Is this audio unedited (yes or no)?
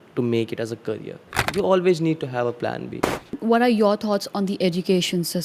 no